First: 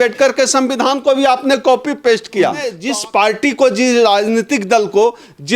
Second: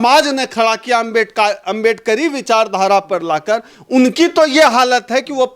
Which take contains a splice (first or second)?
first